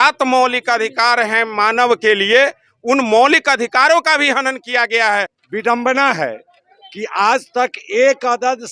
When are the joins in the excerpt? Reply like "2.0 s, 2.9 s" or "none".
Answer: 5.4 s